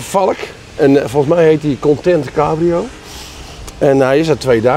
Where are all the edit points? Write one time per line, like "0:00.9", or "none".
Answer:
none